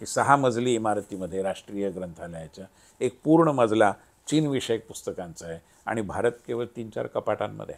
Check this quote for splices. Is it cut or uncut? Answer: uncut